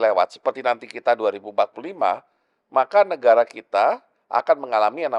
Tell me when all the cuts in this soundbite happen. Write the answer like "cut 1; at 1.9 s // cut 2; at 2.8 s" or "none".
cut 1; at 1.8 s